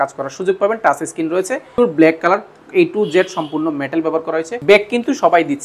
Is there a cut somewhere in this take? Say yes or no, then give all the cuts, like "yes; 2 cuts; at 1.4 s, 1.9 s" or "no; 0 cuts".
yes; 2 cuts; at 1.8 s, 4.5 s